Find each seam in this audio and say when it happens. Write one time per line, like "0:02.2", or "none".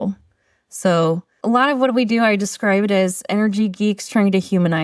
0:01.3